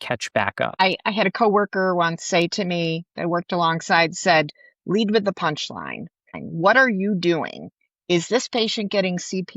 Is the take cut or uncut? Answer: cut